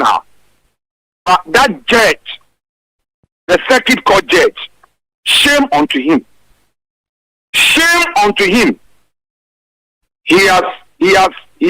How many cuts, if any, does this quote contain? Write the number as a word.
zero